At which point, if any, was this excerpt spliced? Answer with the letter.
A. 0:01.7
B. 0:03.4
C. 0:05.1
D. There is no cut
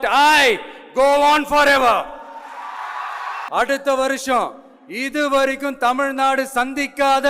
B